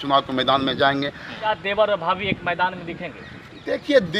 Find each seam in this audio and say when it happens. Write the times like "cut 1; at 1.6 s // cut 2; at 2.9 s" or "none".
cut 1; at 1.4 s